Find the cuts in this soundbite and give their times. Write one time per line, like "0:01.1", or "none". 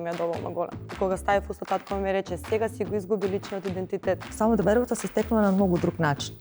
0:00.9
0:04.3